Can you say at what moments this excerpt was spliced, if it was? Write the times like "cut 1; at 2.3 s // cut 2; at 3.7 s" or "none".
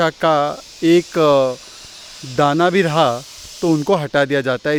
none